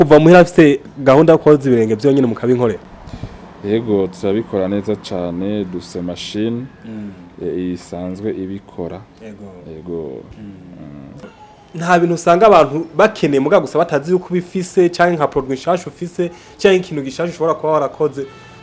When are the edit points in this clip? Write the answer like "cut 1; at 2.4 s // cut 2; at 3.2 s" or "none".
cut 1; at 11.3 s